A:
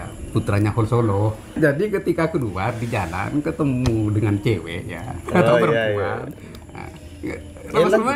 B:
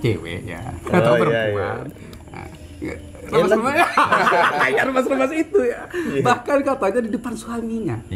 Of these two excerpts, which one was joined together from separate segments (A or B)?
A